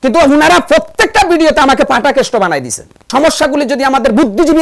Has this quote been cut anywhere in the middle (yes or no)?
yes